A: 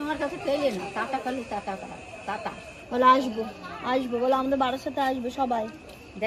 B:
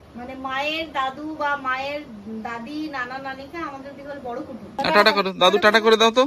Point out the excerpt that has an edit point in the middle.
B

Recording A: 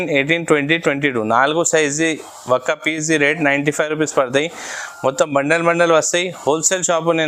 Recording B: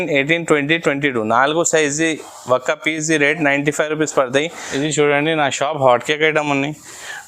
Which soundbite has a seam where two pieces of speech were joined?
B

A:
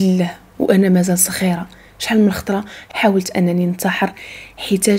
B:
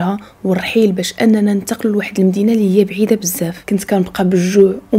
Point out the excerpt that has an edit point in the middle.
B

